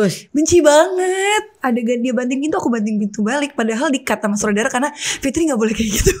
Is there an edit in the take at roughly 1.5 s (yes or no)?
yes